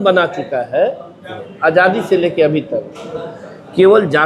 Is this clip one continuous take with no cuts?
no; 1 cut; at 1.4 s

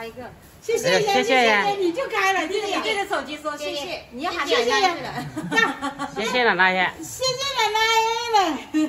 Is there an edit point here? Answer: no; 0 cuts

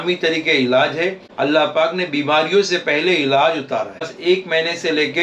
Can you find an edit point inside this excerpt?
yes; 2 cuts; at 1.2 s, 4.1 s

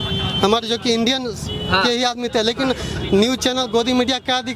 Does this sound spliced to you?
no; 0 cuts

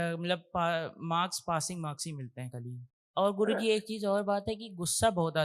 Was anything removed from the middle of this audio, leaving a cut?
yes; 1 cut; at 2.9 s

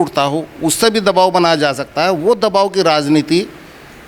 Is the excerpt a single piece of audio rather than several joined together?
yes; 0 cuts

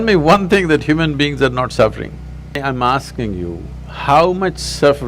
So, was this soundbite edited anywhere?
yes; 1 cut; at 2.6 s

